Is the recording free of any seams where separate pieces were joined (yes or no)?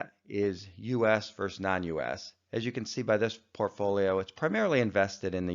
no